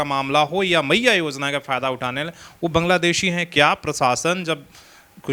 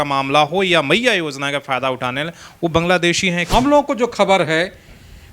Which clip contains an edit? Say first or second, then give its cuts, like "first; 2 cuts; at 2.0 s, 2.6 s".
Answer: second; 1 cut; at 3.5 s